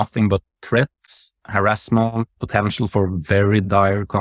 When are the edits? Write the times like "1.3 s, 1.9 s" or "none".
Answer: 2.4 s